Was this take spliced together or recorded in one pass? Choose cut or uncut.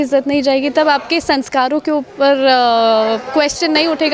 uncut